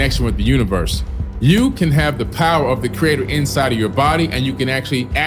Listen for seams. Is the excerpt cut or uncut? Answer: uncut